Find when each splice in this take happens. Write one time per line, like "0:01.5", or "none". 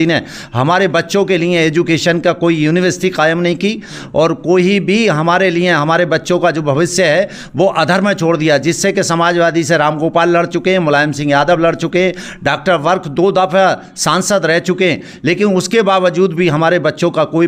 none